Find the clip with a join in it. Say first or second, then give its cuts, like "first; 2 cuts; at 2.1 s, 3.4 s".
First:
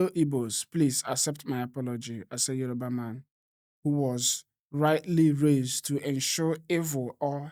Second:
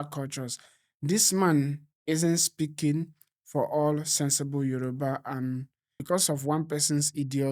second; 1 cut; at 5.9 s